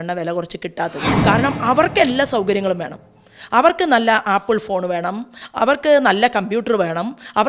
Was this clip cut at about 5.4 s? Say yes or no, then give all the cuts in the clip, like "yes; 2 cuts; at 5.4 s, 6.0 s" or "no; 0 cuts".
no; 1 cut; at 1.1 s